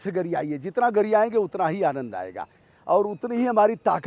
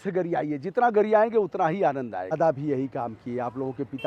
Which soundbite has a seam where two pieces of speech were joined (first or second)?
second